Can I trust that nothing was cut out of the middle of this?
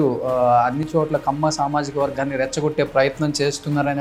yes; 0 cuts

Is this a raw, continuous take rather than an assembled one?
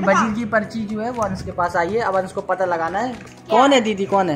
yes; 0 cuts

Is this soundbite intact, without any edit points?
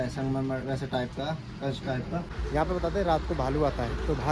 no; 1 cut; at 2.4 s

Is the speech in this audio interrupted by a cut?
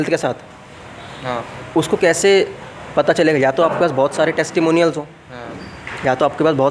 no; 0 cuts

